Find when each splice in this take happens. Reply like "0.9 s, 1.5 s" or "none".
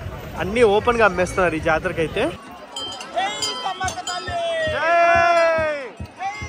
2.4 s

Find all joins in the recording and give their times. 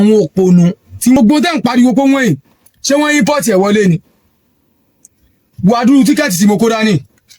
1.2 s

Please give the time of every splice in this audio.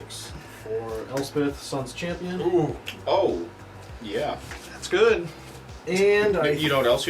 none

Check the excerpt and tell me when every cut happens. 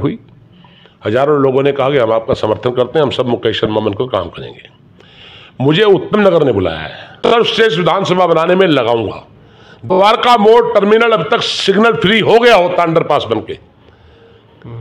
7.2 s

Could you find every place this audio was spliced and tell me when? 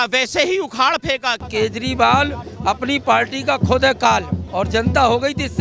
1.5 s, 4.4 s

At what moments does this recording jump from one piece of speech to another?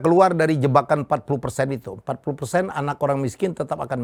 none

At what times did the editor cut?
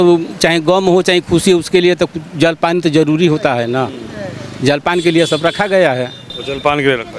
6.3 s

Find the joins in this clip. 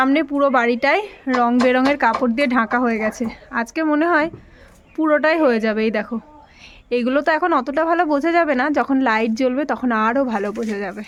none

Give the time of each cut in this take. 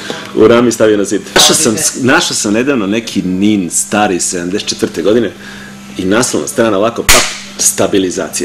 1.4 s

